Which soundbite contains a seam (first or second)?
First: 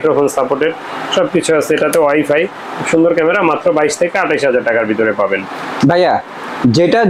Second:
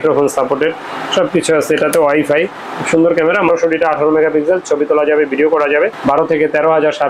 second